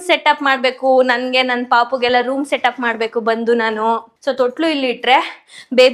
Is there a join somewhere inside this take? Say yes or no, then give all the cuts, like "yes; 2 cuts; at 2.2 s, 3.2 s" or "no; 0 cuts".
yes; 1 cut; at 4.1 s